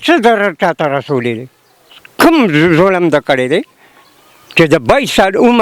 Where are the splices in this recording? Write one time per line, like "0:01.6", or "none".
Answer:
none